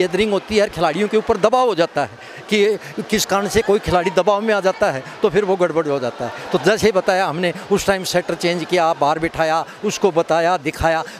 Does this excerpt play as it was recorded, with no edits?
yes; 0 cuts

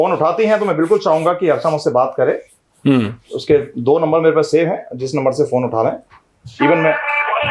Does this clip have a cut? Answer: no; 0 cuts

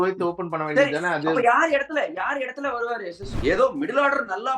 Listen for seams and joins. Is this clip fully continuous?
no; 1 cut; at 3.3 s

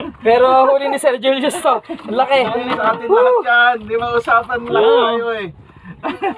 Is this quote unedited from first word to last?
yes; 0 cuts

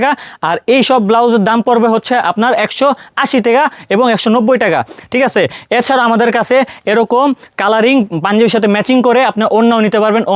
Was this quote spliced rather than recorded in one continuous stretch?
no; 0 cuts

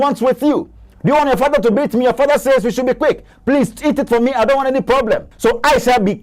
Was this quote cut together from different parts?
yes; 1 cut; at 5.3 s

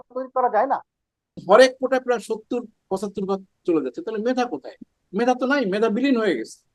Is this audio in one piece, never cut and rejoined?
no; 1 cut; at 1.4 s

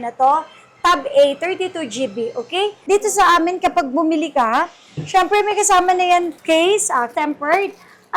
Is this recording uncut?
no; 3 cuts; at 2.8 s, 6.4 s, 7.1 s

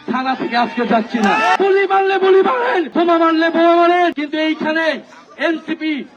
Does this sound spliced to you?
yes; 3 cuts; at 1.6 s, 2.9 s, 4.2 s

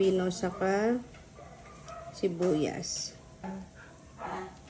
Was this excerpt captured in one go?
no; 1 cut; at 3.8 s

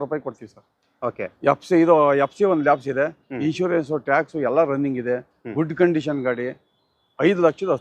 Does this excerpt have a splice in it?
no; 0 cuts

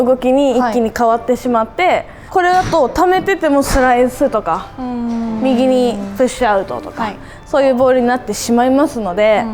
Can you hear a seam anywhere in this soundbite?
no; 0 cuts

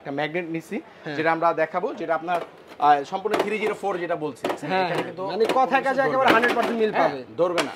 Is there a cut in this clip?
no; 0 cuts

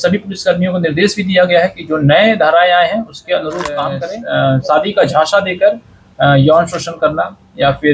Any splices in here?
yes; 1 cut; at 4.0 s

